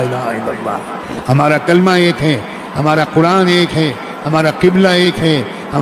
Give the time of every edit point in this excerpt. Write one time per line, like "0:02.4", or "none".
none